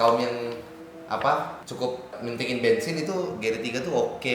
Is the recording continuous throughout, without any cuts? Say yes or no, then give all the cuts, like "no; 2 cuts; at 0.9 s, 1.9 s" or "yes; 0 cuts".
yes; 0 cuts